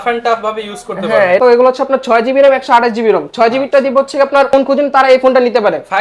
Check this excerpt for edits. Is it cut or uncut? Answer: cut